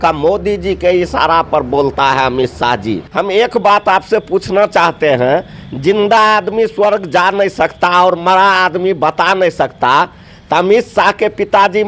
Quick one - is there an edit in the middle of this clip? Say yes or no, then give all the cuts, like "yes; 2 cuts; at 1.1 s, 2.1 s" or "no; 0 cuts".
yes; 1 cut; at 3.0 s